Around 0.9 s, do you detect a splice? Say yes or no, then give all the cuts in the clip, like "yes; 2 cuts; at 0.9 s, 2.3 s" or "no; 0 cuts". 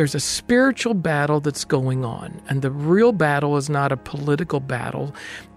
no; 1 cut; at 2.4 s